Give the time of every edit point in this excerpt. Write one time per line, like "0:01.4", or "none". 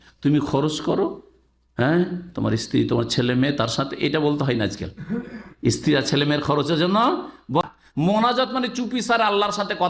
0:07.6